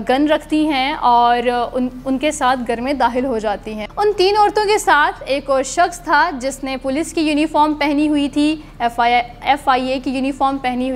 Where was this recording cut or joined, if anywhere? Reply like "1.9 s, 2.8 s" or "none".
none